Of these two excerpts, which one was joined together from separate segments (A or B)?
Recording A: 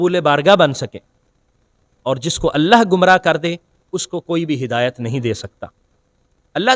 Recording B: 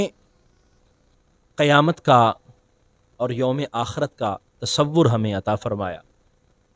A